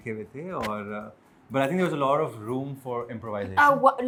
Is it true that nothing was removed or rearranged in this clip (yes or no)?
yes